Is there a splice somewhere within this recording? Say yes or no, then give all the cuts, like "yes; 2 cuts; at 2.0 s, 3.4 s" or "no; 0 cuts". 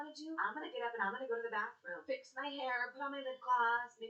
no; 0 cuts